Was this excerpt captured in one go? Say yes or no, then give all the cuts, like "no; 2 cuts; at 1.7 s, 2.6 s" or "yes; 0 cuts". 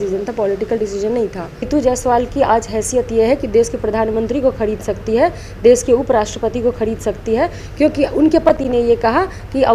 no; 1 cut; at 1.7 s